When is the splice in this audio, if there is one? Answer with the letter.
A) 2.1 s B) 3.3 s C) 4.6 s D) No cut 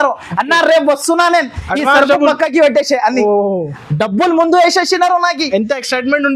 D